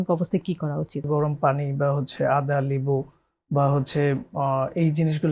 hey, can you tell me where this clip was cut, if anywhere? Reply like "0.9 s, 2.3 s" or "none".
1.0 s

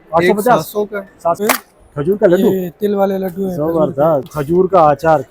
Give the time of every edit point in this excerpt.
1.4 s, 4.3 s

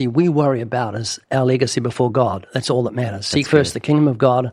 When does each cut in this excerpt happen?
1.1 s

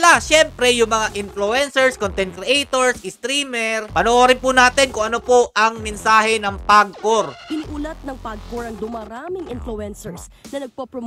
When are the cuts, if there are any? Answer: 3.9 s, 7.4 s

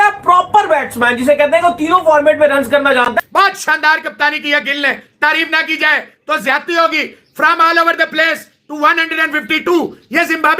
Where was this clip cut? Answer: 3.2 s

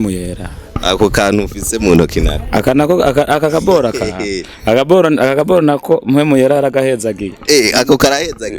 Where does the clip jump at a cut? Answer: none

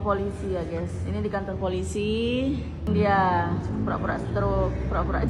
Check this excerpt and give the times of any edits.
2.9 s

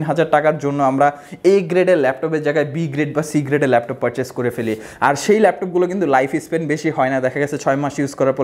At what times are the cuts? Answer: none

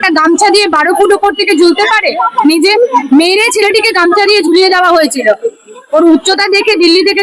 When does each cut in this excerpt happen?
none

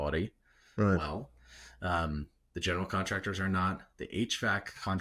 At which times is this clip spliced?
none

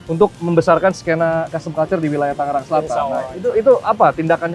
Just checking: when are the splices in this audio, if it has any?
none

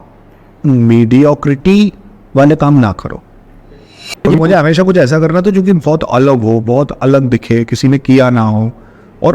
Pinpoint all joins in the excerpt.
4.3 s

